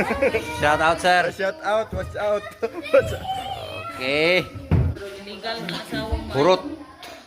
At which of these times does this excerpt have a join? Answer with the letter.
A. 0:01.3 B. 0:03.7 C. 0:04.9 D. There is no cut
C